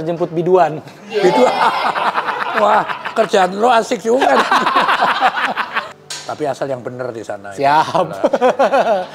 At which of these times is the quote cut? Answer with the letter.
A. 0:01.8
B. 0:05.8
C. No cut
B